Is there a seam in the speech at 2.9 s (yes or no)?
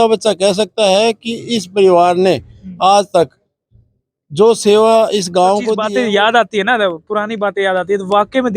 no